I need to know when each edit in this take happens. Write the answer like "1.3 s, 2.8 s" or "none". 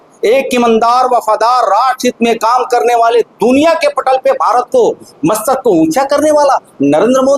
none